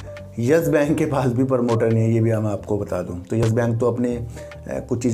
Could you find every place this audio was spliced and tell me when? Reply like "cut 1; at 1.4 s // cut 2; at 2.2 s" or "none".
none